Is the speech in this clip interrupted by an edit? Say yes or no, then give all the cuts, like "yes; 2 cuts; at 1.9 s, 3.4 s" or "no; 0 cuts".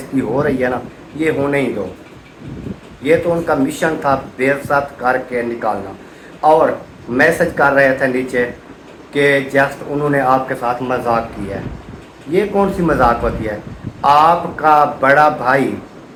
no; 0 cuts